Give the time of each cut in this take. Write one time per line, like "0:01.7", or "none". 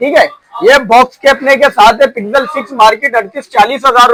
none